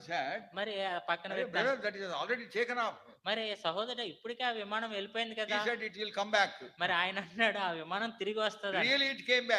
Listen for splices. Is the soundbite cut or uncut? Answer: uncut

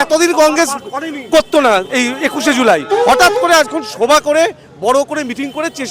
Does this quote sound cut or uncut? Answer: uncut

